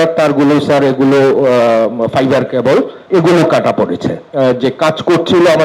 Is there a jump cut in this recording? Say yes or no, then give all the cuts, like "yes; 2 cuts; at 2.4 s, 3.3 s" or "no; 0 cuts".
yes; 2 cuts; at 3.0 s, 4.2 s